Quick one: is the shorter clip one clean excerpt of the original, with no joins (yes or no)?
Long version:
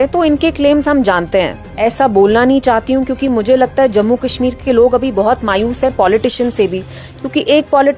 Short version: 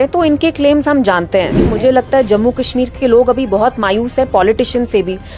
no